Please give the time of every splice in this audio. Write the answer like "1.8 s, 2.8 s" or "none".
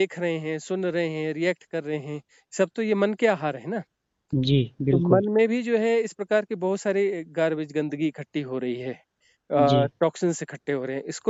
none